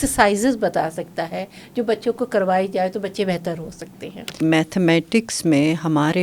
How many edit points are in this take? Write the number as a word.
one